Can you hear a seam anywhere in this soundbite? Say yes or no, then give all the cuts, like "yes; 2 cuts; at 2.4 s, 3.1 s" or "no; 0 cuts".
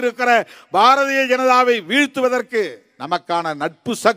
yes; 1 cut; at 2.9 s